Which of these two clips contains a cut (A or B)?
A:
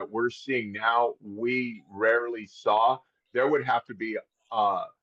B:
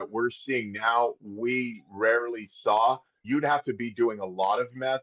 B